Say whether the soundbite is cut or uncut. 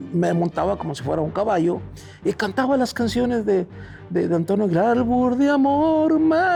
uncut